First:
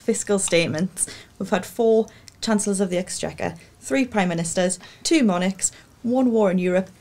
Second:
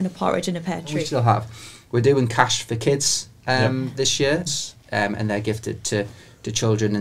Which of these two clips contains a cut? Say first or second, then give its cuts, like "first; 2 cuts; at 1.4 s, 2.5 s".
second; 2 cuts; at 0.9 s, 4.5 s